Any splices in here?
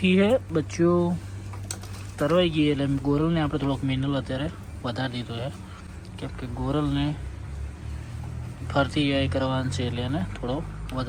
no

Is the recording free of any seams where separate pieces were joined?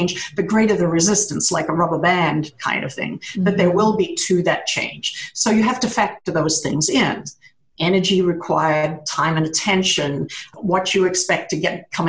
no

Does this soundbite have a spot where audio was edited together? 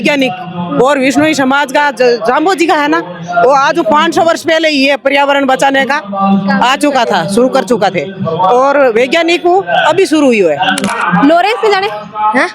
yes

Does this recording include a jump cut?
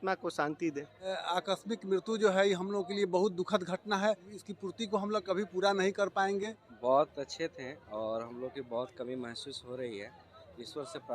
yes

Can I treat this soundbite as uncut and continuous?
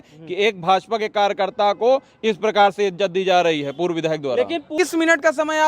no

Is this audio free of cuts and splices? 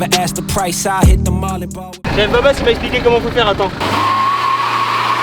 no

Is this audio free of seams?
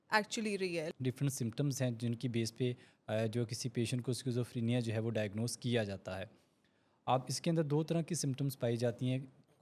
no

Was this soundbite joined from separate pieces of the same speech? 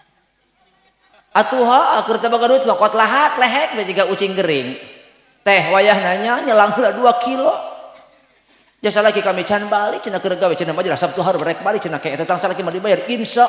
no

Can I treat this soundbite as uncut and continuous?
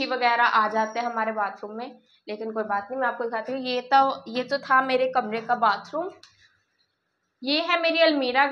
yes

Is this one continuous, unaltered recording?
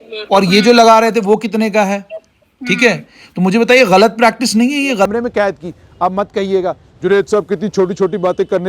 no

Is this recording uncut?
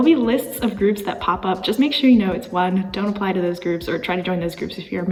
yes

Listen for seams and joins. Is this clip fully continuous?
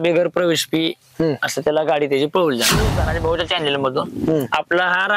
no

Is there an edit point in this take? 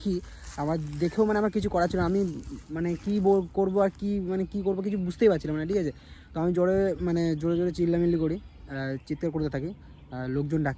no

